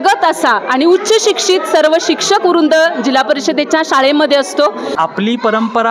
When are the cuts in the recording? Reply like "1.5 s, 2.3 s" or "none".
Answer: 4.9 s

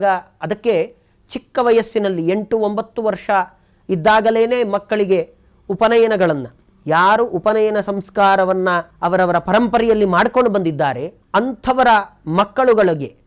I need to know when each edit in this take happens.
8.9 s, 11.1 s

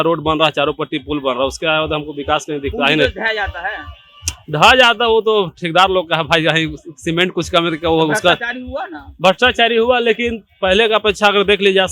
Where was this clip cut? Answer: none

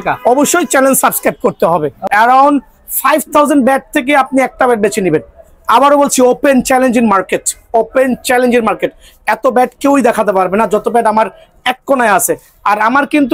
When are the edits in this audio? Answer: 2.0 s

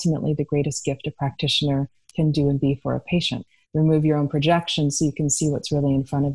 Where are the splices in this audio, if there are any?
2.0 s, 3.4 s

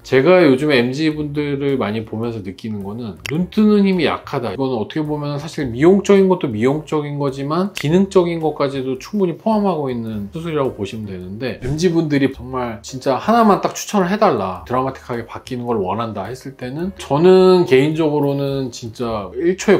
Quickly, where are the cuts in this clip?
4.5 s, 11.7 s, 14.6 s

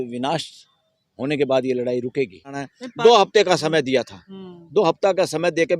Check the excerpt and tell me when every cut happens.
2.6 s

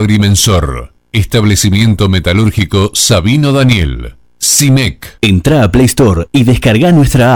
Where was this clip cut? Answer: 5.0 s

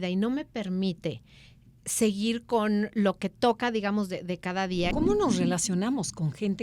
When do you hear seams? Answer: 4.9 s

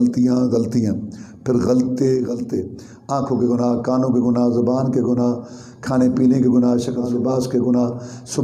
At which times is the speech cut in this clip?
2.3 s, 7.0 s

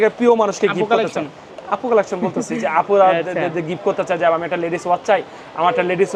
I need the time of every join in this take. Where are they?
none

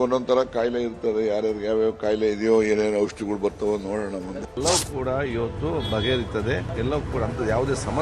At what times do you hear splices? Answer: 4.5 s, 6.7 s

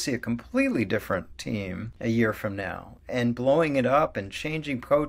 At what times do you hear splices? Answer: 1.8 s

